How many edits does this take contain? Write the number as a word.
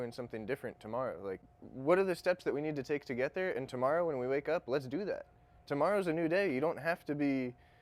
zero